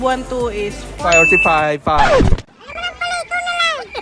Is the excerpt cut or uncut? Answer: uncut